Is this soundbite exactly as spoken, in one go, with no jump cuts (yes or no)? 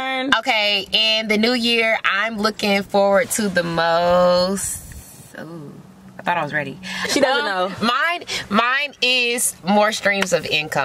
no